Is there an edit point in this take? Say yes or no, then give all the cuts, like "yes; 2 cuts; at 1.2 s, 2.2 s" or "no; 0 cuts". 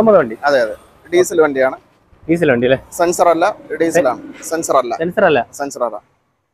no; 0 cuts